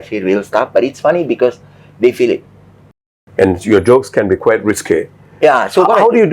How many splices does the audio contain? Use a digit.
1